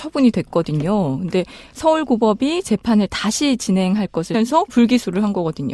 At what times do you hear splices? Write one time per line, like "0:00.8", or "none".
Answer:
none